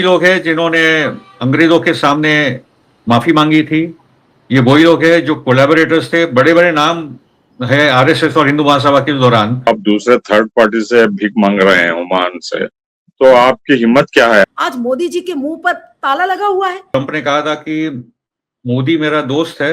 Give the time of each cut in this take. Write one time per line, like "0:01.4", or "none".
0:09.7
0:14.4
0:16.9

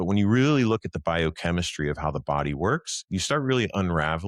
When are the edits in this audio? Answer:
none

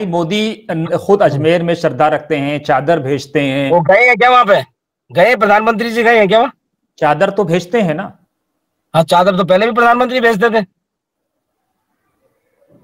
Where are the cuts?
none

